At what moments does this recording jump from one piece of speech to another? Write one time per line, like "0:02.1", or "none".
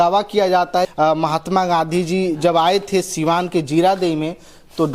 0:00.9